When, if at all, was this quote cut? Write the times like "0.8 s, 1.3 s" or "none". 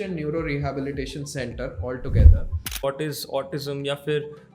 2.8 s